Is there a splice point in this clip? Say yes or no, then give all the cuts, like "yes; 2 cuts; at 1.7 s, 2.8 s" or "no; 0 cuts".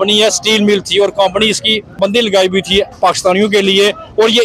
yes; 1 cut; at 2.0 s